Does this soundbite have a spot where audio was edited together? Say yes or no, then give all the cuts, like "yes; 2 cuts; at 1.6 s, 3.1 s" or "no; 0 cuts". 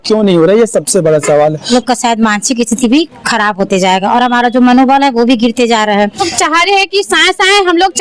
yes; 2 cuts; at 1.7 s, 6.3 s